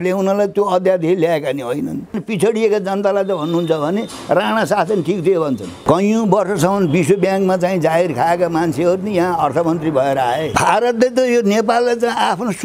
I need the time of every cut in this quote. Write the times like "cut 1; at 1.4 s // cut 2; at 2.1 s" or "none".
cut 1; at 2.2 s // cut 2; at 5.8 s // cut 3; at 10.5 s

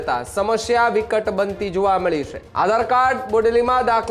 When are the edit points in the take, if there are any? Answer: cut 1; at 2.4 s

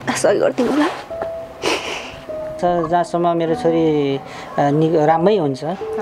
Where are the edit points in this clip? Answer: cut 1; at 2.6 s

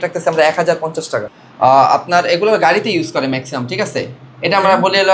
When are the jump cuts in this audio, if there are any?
cut 1; at 1.3 s

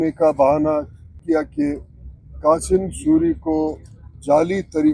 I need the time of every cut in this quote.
cut 1; at 1.2 s

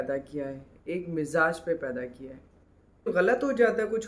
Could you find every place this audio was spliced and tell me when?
cut 1; at 3.1 s

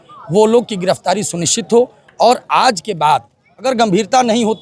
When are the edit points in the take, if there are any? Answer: cut 1; at 3.7 s

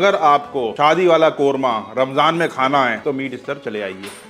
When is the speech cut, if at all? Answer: none

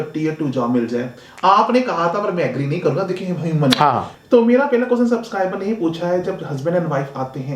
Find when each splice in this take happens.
cut 1; at 4.2 s

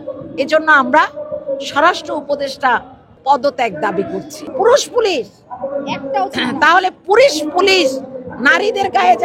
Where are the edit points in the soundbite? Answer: cut 1; at 3.1 s // cut 2; at 4.4 s

